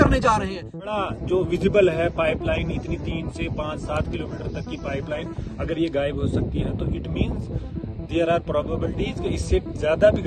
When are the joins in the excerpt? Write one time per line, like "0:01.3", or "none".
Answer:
0:00.9